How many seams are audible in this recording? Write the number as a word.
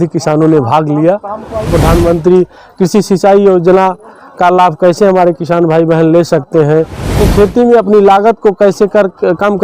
two